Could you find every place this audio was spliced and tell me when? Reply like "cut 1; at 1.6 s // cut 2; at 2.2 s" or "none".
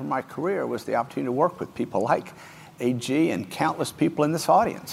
none